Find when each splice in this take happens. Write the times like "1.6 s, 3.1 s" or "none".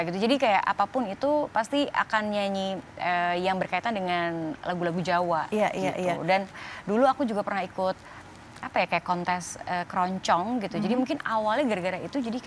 none